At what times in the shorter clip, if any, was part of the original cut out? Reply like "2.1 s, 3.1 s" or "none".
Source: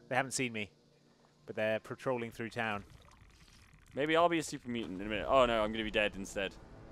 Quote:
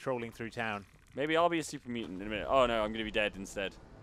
1.0 s